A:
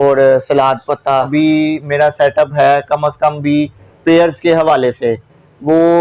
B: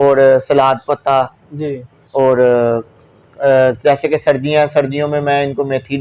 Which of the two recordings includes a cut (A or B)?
A